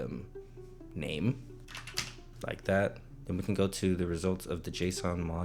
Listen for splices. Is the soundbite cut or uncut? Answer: cut